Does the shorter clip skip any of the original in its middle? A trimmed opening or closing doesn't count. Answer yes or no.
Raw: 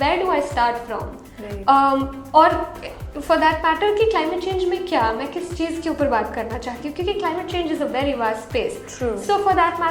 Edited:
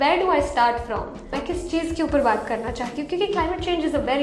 yes